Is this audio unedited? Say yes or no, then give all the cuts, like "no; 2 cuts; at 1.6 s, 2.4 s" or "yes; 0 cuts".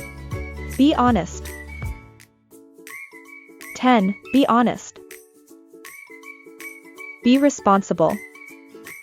no; 4 cuts; at 0.7 s, 4.8 s, 6.6 s, 8.2 s